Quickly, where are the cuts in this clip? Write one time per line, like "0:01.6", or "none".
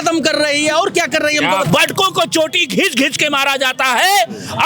0:01.7

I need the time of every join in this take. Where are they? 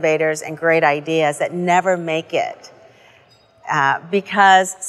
none

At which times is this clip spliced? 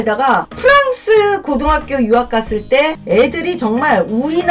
0:03.0

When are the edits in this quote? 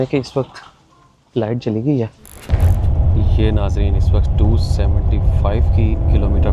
0:02.2

